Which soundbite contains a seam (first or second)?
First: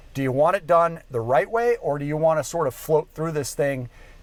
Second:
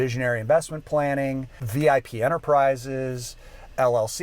second